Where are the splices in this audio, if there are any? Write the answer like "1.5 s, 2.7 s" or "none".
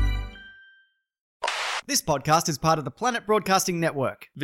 1.7 s